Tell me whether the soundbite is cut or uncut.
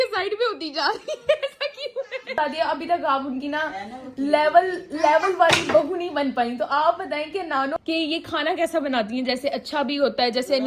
cut